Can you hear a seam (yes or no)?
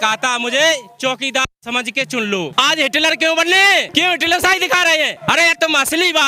yes